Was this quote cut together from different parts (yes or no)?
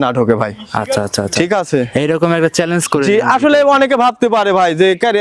no